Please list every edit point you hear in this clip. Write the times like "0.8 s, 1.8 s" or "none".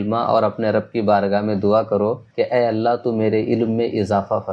2.2 s